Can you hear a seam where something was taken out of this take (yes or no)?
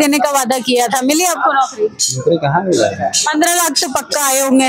no